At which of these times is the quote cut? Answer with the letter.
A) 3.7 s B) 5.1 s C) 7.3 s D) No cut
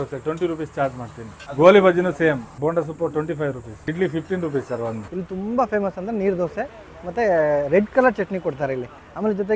B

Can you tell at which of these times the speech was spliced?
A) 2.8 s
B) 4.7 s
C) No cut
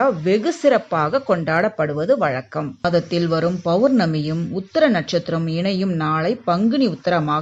A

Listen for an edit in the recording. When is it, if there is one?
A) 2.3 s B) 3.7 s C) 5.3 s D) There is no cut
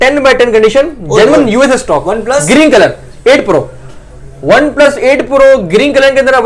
D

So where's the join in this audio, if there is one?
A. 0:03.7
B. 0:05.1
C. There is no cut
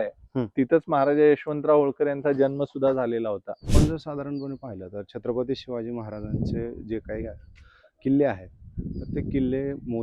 A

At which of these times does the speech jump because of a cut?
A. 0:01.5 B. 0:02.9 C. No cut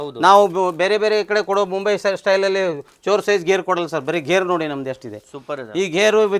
C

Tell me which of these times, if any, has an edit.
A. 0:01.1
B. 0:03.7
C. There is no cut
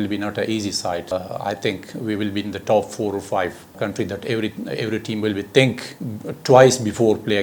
A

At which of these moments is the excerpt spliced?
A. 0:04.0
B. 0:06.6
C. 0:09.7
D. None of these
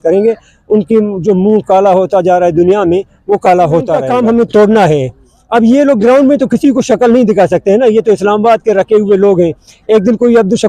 A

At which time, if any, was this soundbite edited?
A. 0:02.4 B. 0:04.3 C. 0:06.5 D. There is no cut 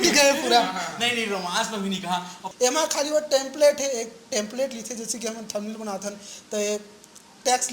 A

